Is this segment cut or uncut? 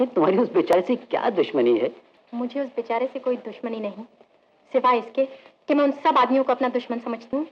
uncut